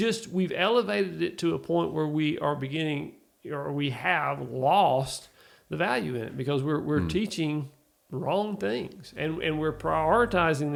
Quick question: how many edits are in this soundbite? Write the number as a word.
zero